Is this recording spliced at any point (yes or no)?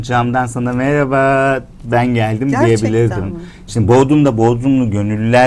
no